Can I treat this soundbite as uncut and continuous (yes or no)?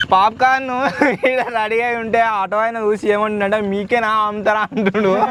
yes